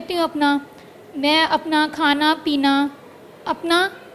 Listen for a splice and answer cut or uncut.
uncut